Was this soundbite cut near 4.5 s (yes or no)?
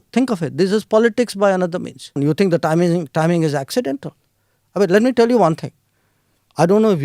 no